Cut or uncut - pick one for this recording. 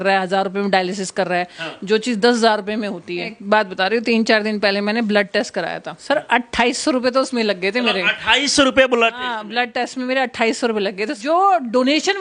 cut